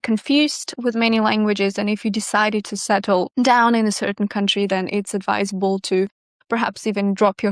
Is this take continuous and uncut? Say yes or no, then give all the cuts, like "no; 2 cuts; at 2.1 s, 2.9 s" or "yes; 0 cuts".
yes; 0 cuts